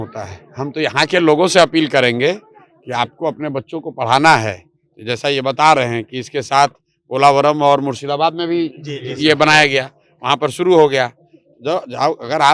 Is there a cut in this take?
no; 0 cuts

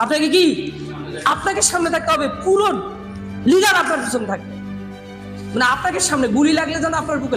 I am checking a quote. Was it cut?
no; 0 cuts

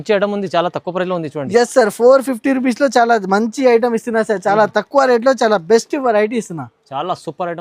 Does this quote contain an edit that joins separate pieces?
no; 0 cuts

